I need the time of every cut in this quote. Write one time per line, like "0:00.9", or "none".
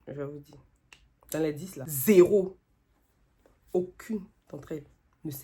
0:01.8